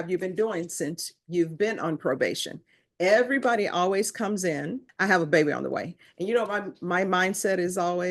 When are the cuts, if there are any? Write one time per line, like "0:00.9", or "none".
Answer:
0:04.9